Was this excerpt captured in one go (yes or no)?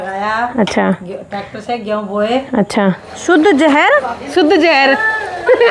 no